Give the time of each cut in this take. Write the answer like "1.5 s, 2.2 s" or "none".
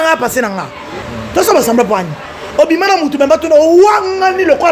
1.1 s